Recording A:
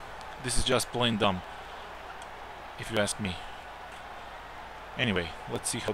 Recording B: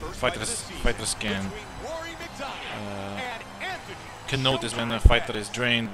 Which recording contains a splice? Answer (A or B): B